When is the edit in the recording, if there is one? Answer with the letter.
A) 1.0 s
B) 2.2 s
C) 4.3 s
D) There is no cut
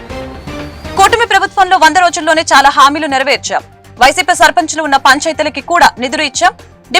A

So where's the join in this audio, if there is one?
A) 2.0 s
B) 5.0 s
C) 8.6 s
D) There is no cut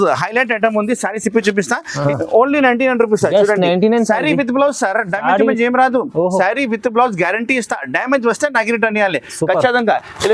A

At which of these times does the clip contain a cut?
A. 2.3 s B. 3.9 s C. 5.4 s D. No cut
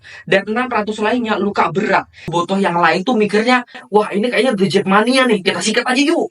A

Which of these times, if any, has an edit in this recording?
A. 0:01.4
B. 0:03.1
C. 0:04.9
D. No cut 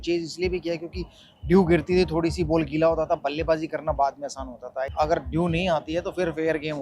C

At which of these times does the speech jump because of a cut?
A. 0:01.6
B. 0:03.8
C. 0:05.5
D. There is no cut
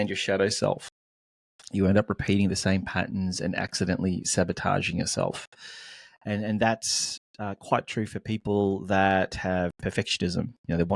D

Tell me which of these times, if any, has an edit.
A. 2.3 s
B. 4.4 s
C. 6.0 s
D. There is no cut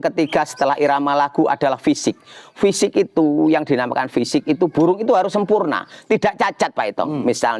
D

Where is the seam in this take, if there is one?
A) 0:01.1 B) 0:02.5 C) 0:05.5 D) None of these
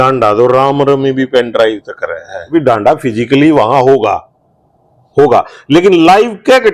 B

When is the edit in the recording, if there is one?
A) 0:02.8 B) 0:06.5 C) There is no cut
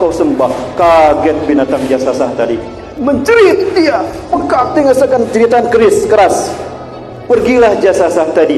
C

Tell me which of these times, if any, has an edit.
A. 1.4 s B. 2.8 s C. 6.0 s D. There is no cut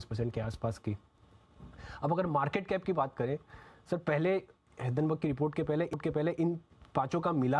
C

